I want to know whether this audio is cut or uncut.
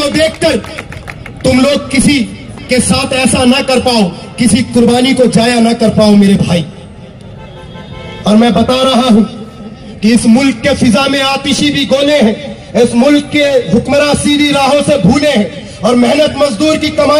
uncut